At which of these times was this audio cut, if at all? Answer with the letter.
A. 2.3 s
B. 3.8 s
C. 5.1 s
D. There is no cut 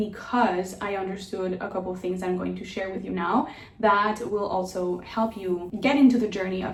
D